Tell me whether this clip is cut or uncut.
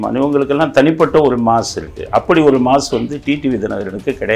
uncut